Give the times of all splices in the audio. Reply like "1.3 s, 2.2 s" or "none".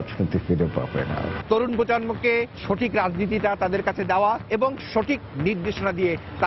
1.4 s, 4.4 s